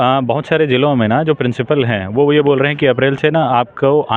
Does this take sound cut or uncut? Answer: uncut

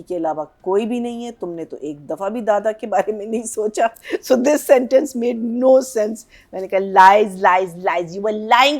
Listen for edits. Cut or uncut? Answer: uncut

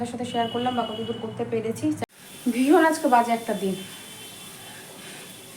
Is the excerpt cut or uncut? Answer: cut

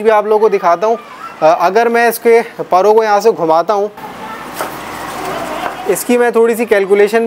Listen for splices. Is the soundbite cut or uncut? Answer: cut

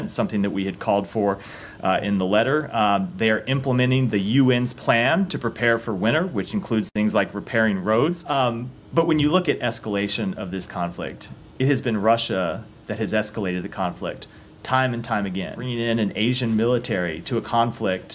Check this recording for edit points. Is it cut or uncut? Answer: cut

